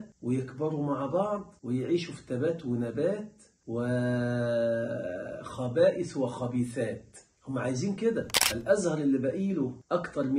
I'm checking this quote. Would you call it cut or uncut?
cut